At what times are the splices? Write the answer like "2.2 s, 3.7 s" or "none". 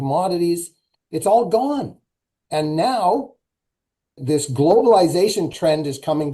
4.2 s